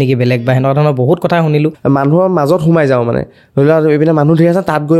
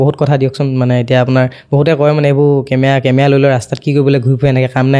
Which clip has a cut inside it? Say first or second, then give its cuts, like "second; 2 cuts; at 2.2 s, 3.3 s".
first; 1 cut; at 1.8 s